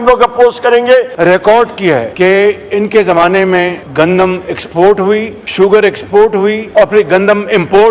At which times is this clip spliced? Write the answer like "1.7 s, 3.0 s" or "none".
1.1 s, 2.1 s, 3.8 s, 5.4 s, 6.6 s